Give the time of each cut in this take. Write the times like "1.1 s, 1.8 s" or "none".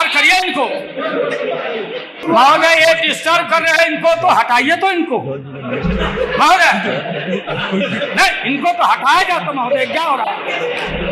none